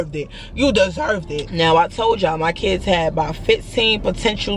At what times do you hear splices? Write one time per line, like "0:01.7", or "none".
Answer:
0:01.4